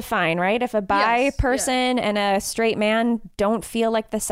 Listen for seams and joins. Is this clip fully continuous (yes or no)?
yes